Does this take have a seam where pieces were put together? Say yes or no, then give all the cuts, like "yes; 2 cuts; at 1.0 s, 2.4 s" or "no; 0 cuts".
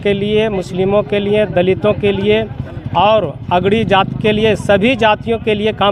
no; 0 cuts